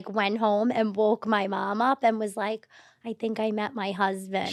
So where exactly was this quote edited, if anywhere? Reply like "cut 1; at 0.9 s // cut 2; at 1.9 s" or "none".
none

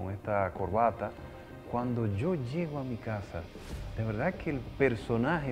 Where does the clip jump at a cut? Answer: none

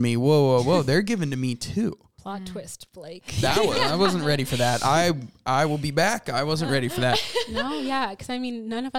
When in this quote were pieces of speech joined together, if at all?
none

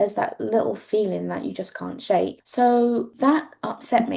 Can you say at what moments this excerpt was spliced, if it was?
cut 1; at 2.4 s // cut 2; at 3.1 s

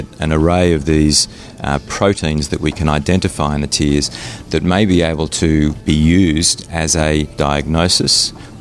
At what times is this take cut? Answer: cut 1; at 5.8 s // cut 2; at 7.3 s

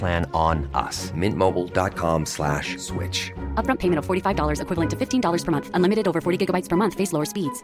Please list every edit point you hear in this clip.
none

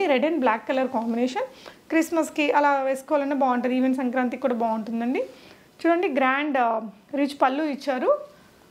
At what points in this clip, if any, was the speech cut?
none

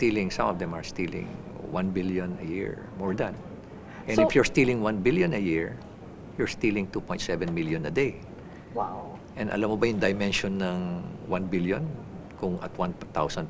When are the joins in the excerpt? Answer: none

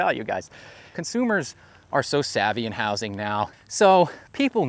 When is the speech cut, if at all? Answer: cut 1; at 0.9 s // cut 2; at 3.5 s

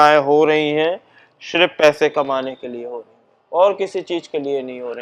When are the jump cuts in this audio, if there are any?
none

